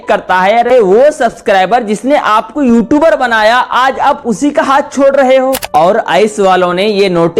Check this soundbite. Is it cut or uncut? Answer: cut